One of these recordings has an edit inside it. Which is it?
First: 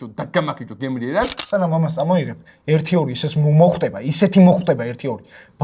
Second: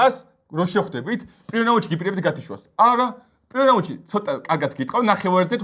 first; 1 cut; at 1.4 s

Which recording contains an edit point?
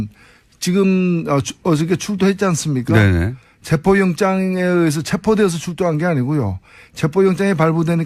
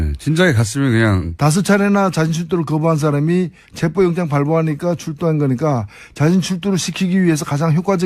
second; 1 cut; at 1.1 s

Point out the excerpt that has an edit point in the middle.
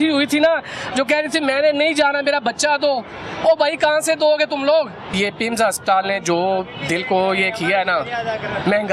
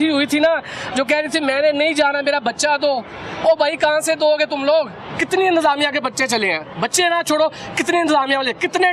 second; 1 cut; at 5.1 s

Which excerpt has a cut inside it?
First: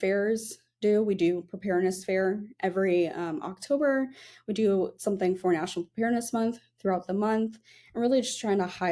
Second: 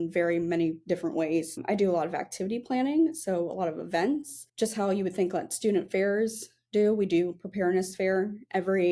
second; 2 cuts; at 1.6 s, 4.4 s

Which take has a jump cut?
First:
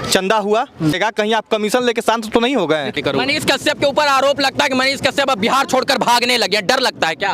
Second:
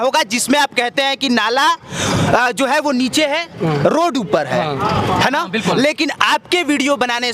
first; 2 cuts; at 1.0 s, 2.9 s

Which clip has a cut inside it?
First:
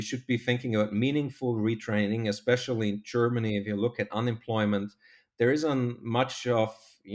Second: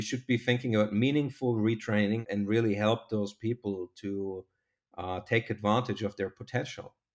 second; 1 cut; at 2.2 s

